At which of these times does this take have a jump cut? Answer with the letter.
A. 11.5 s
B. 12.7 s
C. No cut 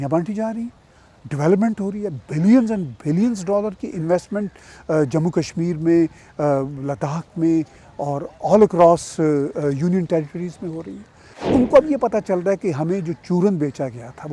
A